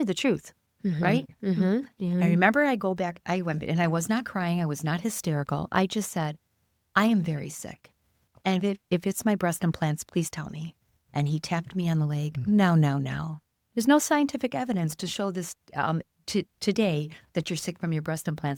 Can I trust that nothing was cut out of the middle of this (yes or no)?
yes